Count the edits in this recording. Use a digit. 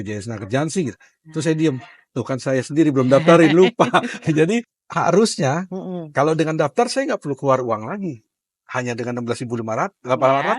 1